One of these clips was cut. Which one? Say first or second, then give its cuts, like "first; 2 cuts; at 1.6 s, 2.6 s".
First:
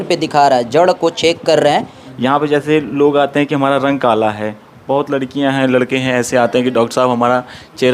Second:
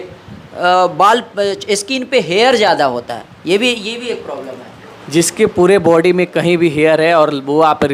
first; 1 cut; at 2.0 s